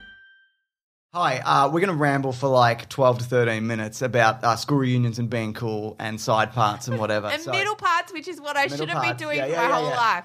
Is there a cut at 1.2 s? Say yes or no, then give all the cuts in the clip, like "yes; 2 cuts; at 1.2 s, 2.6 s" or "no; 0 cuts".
yes; 1 cut; at 1.2 s